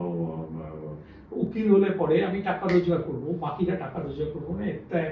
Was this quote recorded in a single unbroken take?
yes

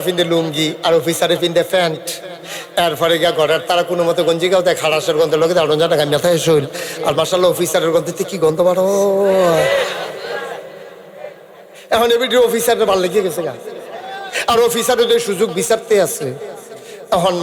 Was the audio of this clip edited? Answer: no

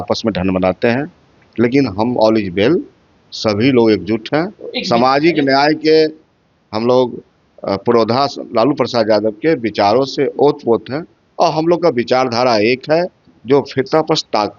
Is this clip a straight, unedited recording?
yes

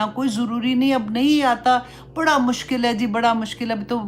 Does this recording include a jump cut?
no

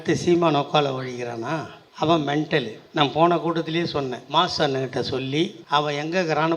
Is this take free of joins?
no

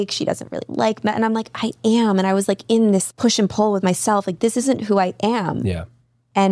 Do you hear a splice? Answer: yes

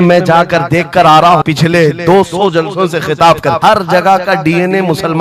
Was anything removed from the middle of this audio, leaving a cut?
yes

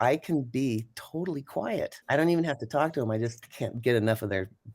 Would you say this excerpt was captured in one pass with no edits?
no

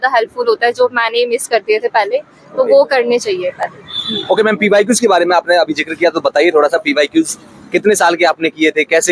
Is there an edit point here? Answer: no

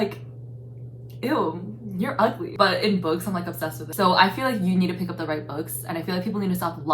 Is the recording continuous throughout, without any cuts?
no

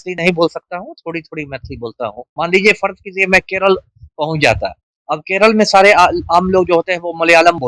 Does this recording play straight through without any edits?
no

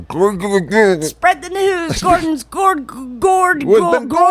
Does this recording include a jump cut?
no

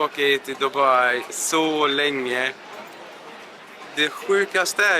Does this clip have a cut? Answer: no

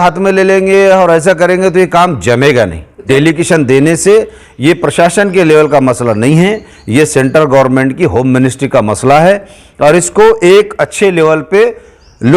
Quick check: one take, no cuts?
no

